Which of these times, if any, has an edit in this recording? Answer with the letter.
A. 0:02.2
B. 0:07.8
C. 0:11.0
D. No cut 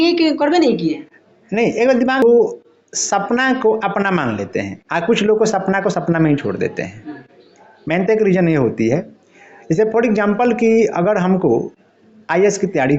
A